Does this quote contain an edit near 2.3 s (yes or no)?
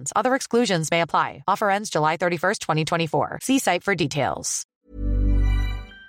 no